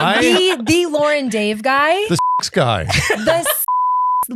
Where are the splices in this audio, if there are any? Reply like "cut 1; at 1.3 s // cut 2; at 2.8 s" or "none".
none